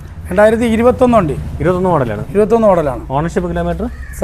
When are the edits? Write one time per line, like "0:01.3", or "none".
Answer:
none